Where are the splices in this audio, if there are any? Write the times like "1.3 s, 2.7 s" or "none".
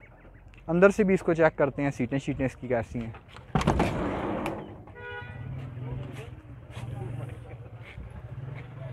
none